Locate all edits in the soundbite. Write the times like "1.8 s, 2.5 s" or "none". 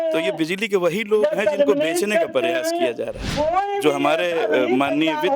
3.2 s